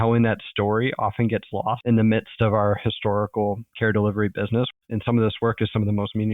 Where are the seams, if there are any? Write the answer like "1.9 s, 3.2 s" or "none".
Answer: 1.8 s, 4.7 s